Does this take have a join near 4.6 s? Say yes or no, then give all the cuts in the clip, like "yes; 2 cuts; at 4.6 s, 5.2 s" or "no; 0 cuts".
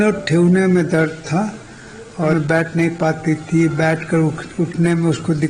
no; 1 cut; at 2.3 s